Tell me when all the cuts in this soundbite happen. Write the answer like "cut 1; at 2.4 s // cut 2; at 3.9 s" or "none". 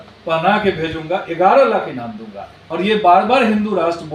cut 1; at 2.6 s